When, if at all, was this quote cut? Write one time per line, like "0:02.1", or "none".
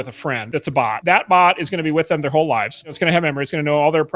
0:00.8
0:03.0